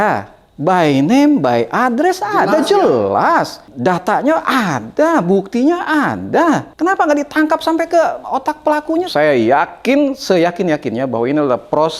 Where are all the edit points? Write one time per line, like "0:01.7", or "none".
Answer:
0:03.6
0:06.7
0:09.1